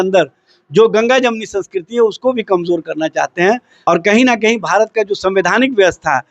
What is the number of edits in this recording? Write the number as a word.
one